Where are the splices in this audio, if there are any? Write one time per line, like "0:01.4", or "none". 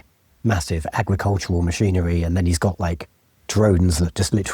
none